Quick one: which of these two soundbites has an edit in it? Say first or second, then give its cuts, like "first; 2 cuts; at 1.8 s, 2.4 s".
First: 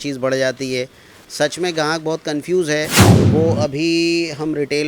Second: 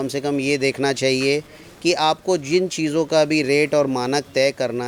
first; 1 cut; at 3.1 s